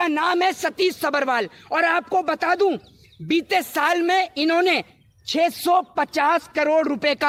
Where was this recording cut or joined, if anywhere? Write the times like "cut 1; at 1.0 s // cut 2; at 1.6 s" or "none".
none

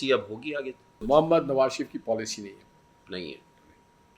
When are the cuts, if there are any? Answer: cut 1; at 1.0 s

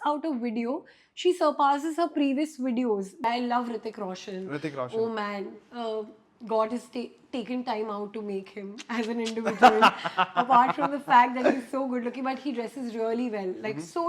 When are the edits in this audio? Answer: cut 1; at 3.2 s

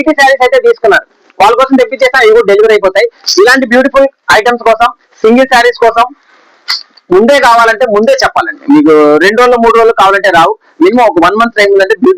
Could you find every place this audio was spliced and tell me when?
none

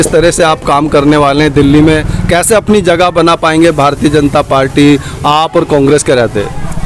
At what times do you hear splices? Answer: none

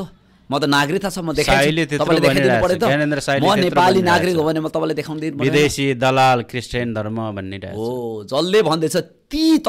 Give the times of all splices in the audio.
none

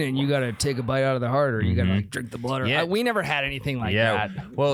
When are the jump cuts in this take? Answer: none

